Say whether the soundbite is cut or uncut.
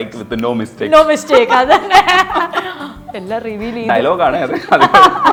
uncut